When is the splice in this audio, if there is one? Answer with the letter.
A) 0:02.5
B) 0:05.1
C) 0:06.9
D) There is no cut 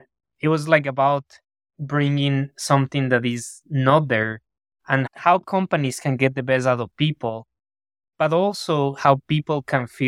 B